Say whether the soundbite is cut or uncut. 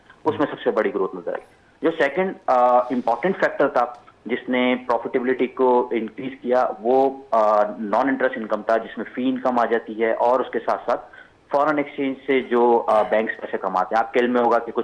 uncut